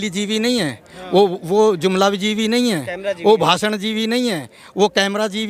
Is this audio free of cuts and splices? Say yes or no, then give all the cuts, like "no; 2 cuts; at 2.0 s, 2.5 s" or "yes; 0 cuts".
yes; 0 cuts